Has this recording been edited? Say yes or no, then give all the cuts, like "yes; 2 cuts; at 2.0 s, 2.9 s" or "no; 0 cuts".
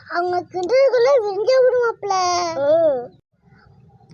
no; 0 cuts